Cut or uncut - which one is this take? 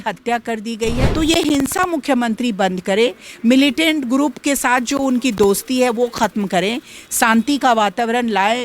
cut